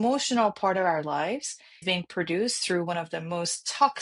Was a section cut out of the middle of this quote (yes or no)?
yes